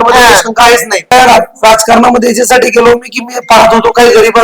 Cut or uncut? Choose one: cut